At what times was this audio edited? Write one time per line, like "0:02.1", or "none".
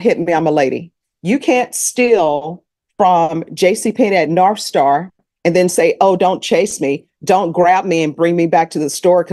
none